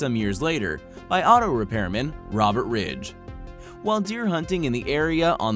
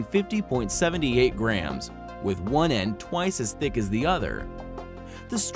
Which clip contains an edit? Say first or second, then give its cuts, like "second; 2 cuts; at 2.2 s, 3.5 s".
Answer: first; 1 cut; at 1.4 s